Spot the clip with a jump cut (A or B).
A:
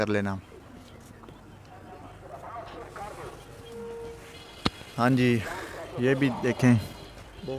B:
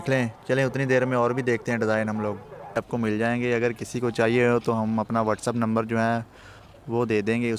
B